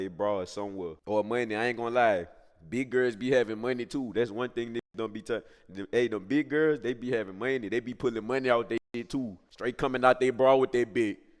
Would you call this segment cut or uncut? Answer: cut